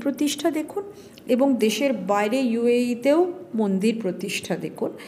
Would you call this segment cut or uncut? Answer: uncut